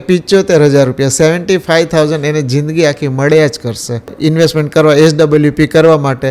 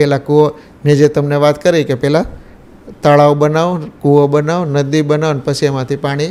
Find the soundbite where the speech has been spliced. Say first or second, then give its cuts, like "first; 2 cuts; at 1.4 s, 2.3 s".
first; 1 cut; at 4.1 s